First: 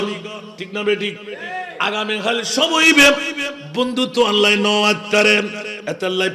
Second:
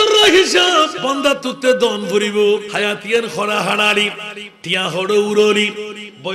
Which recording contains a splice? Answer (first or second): second